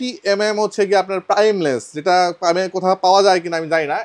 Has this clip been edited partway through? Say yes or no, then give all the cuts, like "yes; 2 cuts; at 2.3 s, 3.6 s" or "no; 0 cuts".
no; 0 cuts